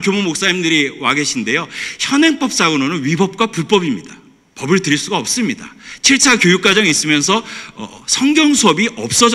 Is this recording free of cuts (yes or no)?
yes